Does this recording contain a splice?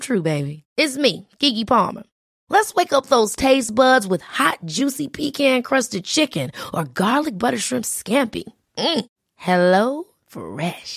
no; 0 cuts

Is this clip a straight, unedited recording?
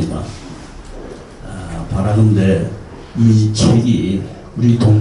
yes; 0 cuts

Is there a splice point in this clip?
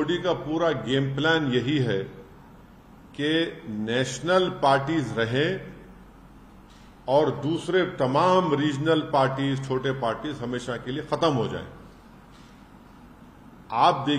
no; 0 cuts

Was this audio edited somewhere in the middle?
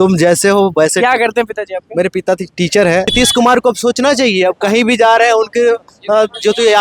yes; 1 cut; at 3.1 s

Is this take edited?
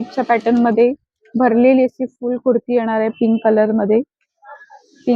no; 0 cuts

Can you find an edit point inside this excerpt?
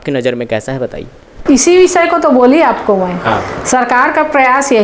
no; 0 cuts

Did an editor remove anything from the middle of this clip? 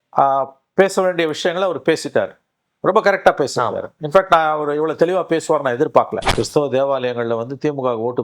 yes; 1 cut; at 6.2 s

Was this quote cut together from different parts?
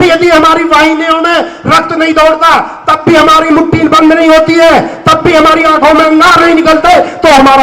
no; 0 cuts

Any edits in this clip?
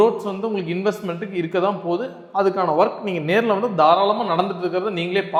no; 0 cuts

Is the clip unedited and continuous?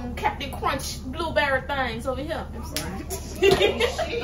yes; 0 cuts

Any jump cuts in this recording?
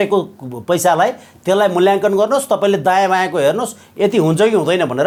no; 0 cuts

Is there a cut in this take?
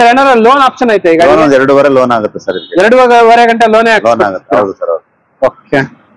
no; 0 cuts

